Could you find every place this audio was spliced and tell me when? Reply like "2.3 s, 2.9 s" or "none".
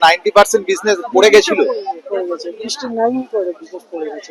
none

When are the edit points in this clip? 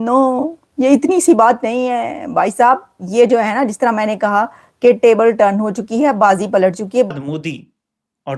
7.1 s

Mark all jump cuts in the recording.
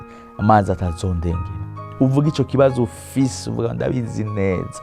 none

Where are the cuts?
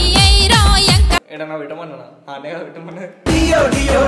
1.3 s

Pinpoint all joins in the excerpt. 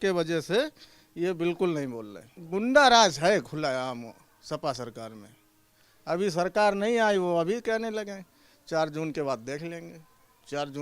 2.3 s

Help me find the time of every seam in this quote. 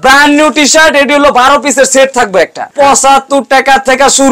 2.7 s

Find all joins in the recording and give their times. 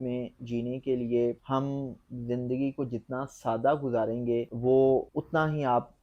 1.4 s, 4.5 s, 5.1 s

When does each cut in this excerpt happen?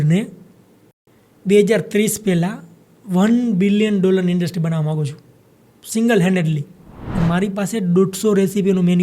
7.1 s

